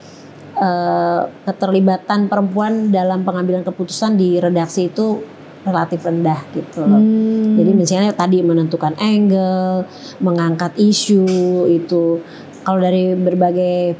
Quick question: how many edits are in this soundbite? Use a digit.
0